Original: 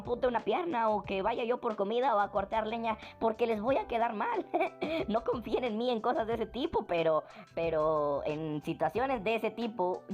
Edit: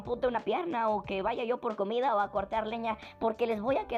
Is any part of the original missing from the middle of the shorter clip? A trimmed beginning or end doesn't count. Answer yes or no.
no